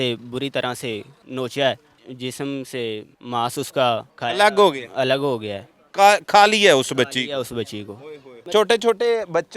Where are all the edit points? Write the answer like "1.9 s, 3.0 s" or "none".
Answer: 1.2 s, 2.1 s, 3.1 s, 4.1 s, 8.4 s